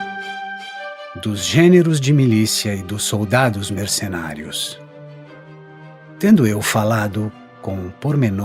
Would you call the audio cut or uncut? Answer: cut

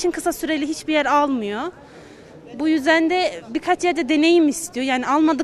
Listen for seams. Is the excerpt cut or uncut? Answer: uncut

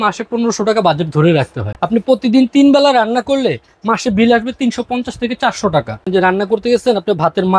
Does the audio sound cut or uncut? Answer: cut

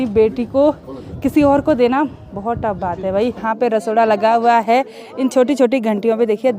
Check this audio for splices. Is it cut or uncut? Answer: cut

